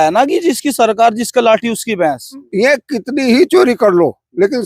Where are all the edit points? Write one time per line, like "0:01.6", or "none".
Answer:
0:02.4

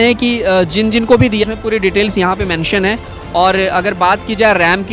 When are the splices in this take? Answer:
none

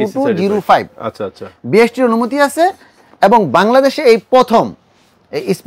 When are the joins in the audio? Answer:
none

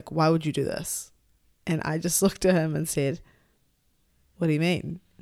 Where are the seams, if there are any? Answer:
none

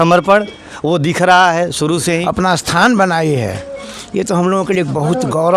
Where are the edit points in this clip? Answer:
0:02.2

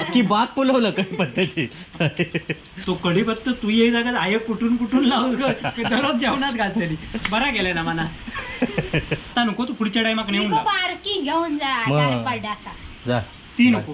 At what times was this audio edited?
0:02.7
0:09.3

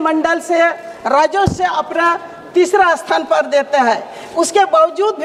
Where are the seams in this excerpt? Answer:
none

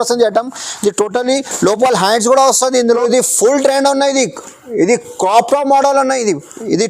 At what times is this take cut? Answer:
0:02.8

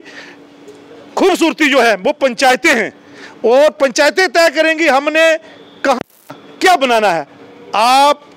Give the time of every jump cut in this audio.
none

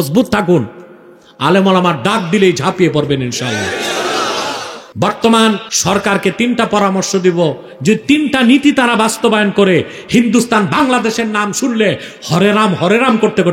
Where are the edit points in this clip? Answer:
0:04.8
0:05.7

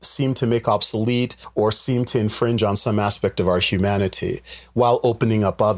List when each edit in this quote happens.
0:01.4

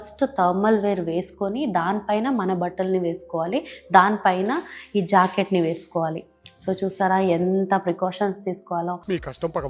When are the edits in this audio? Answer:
none

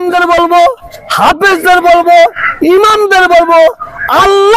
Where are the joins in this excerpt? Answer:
none

